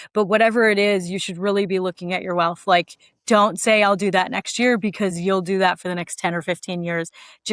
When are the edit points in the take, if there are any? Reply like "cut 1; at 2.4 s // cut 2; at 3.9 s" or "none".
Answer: none